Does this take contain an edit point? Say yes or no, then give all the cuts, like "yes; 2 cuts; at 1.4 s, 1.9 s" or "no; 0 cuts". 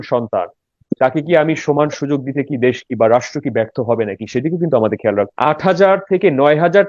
yes; 1 cut; at 5.3 s